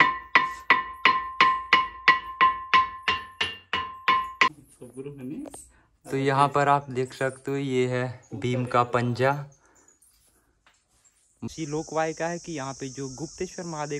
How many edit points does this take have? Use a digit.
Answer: 2